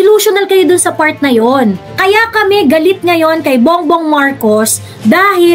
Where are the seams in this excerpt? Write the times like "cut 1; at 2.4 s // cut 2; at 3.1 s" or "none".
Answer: cut 1; at 1.9 s